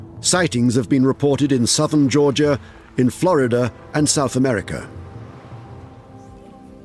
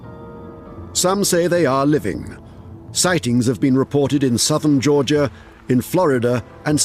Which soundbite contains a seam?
first; 1 cut; at 5.4 s

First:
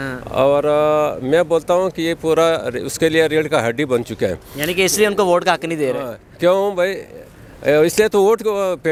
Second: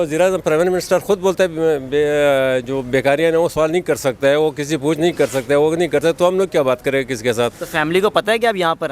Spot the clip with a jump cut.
second; 1 cut; at 7.6 s

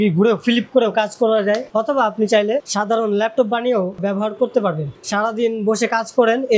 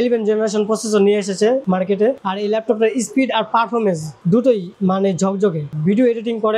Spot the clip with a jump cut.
first; 3 cuts; at 1.7 s, 2.7 s, 5.0 s

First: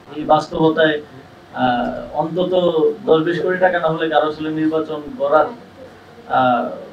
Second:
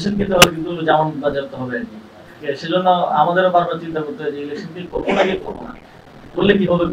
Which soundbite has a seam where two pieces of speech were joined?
second; 1 cut; at 2.4 s

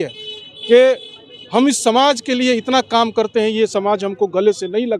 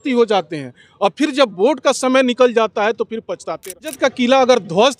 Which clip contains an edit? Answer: second; 1 cut; at 3.9 s

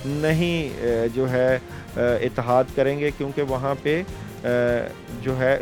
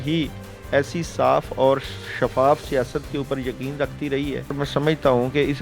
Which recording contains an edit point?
second; 1 cut; at 4.6 s

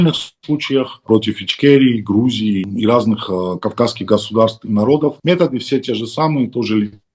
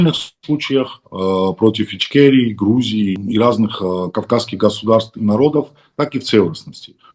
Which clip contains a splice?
first; 2 cuts; at 1.0 s, 5.2 s

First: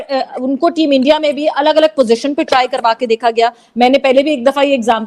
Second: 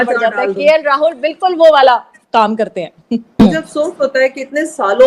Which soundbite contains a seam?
second; 1 cut; at 3.4 s

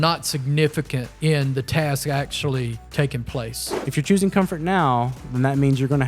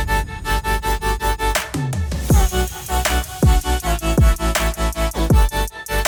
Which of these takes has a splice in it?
first; 3 cuts; at 1.0 s, 2.8 s, 3.8 s

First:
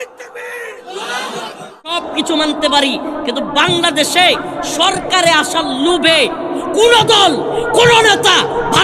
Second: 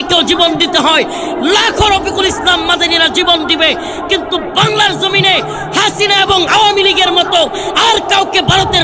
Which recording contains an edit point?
first; 1 cut; at 2.0 s

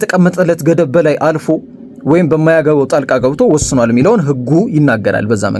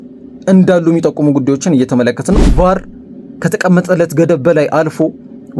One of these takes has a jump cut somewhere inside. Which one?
second; 1 cut; at 2.4 s

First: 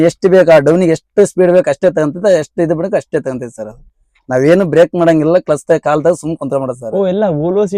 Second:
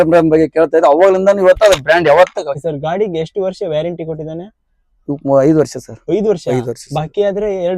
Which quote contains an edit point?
second; 1 cut; at 2.6 s

